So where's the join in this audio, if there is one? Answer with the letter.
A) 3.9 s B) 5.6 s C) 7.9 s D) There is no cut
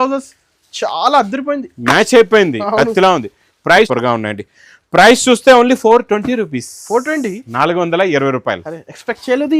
A